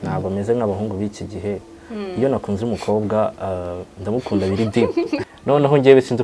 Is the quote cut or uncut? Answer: cut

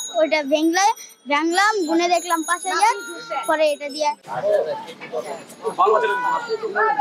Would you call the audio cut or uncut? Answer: uncut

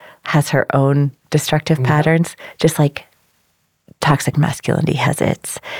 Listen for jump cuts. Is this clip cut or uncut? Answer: uncut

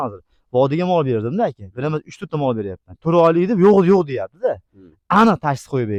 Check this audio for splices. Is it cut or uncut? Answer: uncut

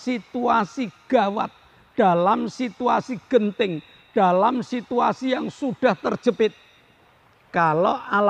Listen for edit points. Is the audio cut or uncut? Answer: uncut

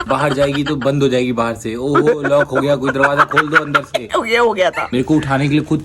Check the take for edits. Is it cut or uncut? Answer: cut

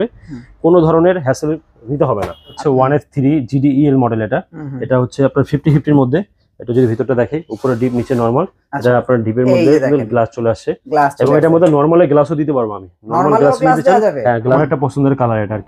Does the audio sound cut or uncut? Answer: cut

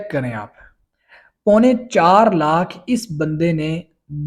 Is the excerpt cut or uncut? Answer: uncut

